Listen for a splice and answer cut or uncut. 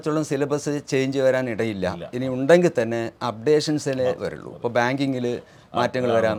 uncut